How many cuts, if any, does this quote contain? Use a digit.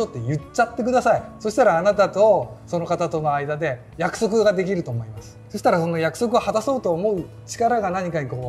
0